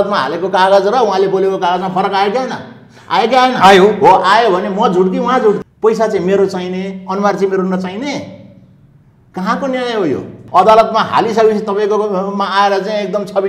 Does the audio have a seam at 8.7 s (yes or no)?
no